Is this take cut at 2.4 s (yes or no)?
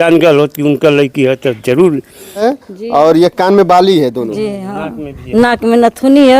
yes